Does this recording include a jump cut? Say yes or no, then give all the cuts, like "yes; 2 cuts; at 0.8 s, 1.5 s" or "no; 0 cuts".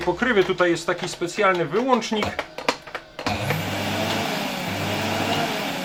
no; 0 cuts